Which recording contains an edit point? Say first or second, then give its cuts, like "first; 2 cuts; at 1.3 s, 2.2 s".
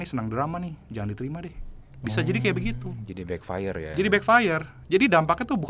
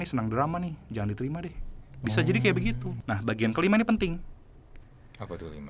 second; 1 cut; at 2.9 s